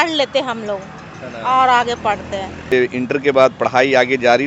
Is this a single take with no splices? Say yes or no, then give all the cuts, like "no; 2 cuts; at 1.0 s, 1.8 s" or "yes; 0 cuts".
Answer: no; 1 cut; at 2.7 s